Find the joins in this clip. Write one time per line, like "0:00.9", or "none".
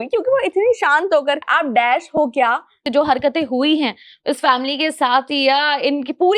0:01.5
0:02.8